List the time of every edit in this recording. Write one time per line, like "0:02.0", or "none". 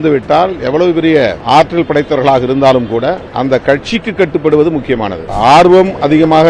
0:01.4
0:03.3
0:05.2